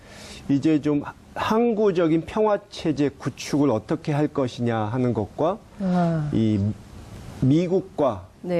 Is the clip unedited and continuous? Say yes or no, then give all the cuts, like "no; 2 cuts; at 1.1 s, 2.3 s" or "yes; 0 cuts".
yes; 0 cuts